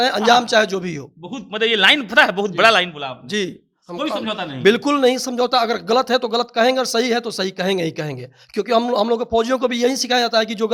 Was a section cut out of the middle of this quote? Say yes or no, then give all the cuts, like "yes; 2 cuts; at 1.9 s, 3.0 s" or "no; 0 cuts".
no; 0 cuts